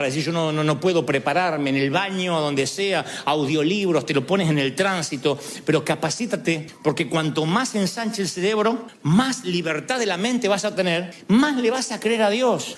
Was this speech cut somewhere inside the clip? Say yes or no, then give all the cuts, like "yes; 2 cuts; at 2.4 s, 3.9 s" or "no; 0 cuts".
no; 0 cuts